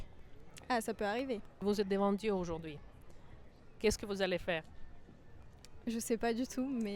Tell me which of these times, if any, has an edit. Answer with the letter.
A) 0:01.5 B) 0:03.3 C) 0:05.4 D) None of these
A